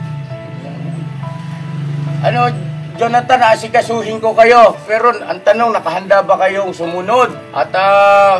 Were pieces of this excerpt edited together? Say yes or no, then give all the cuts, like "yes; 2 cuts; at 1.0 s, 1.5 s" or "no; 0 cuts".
yes; 1 cut; at 7.4 s